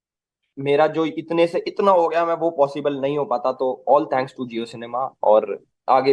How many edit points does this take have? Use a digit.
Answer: 0